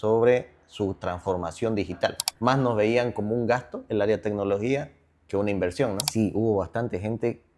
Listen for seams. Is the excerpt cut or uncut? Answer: cut